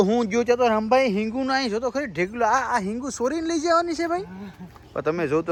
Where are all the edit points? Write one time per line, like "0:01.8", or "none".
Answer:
none

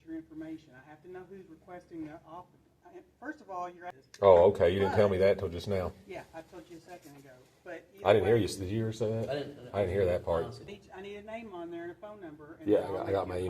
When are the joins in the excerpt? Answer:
0:04.0
0:10.7

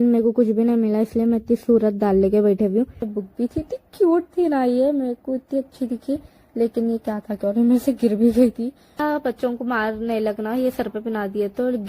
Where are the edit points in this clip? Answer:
0:03.1
0:08.9

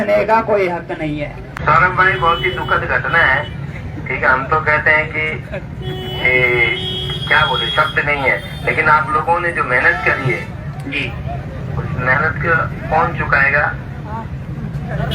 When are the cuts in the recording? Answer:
0:01.5

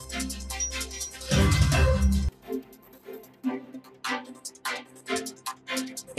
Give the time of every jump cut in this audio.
0:02.2

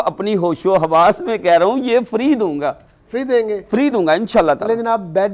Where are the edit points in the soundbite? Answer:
none

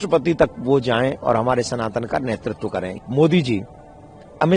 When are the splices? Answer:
0:03.0

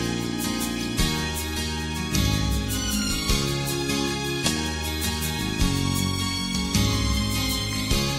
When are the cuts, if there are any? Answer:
none

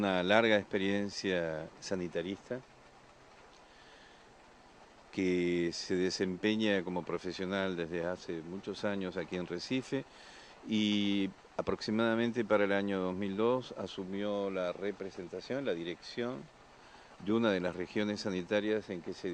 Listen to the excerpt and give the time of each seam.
0:18.0

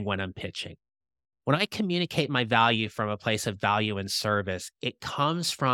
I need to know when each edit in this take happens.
none

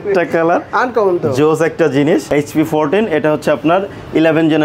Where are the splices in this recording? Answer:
0:02.3

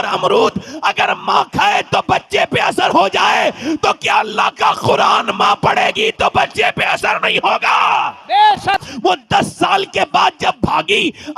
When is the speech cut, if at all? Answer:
0:08.8

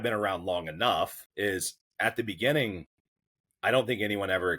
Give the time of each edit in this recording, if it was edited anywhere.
0:01.2

